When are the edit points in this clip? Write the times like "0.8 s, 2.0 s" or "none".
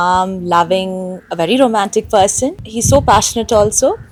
none